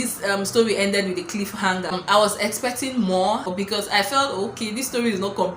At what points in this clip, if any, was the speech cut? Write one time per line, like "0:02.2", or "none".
0:02.0
0:03.5